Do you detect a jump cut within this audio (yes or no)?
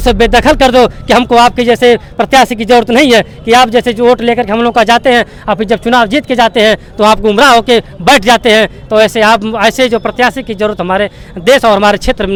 no